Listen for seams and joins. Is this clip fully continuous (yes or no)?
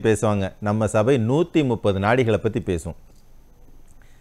yes